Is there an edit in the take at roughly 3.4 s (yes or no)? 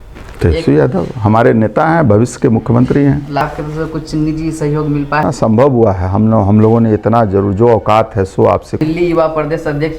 yes